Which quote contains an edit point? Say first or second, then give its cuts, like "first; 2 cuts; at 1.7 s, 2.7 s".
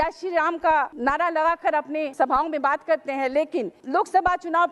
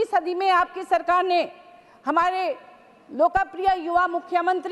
first; 3 cuts; at 0.9 s, 2.1 s, 3.8 s